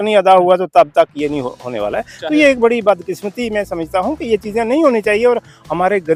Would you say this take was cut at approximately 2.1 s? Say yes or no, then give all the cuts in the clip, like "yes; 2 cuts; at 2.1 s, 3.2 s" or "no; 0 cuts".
no; 0 cuts